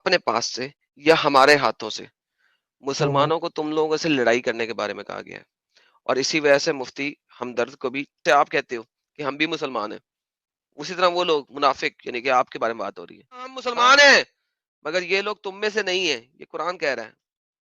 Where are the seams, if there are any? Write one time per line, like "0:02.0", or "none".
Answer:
0:08.2
0:13.6